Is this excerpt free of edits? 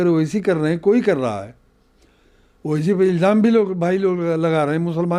yes; 0 cuts

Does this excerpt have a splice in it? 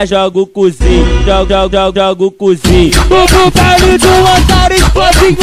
no; 0 cuts

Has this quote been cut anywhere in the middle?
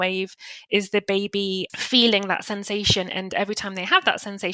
yes; 1 cut; at 1.7 s

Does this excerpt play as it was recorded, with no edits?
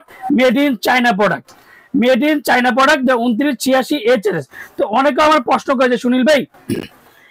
yes; 0 cuts

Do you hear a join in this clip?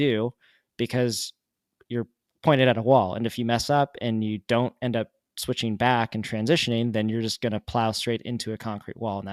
no; 0 cuts

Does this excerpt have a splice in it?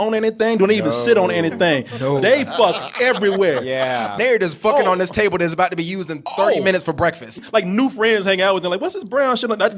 yes; 2 cuts; at 4.2 s, 7.3 s

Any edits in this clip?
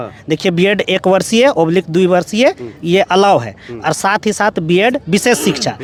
no; 0 cuts

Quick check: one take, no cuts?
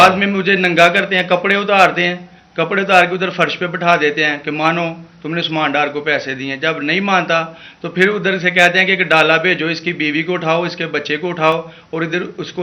yes; 0 cuts

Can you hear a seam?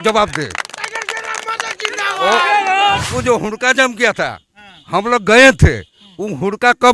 yes; 1 cut; at 3.0 s

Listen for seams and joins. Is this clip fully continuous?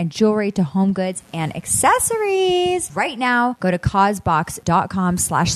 no; 2 cuts; at 3.6 s, 4.5 s

